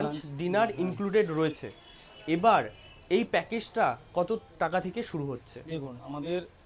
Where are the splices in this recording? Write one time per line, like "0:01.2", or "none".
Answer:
none